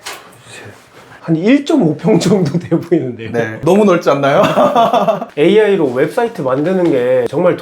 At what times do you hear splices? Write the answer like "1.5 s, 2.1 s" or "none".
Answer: 5.2 s